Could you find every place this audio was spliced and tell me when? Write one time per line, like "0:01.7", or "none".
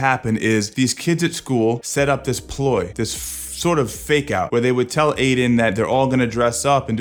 none